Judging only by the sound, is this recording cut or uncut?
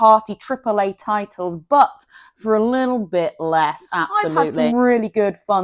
cut